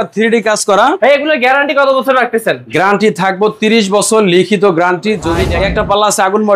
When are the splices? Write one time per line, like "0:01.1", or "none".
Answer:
0:01.0
0:05.4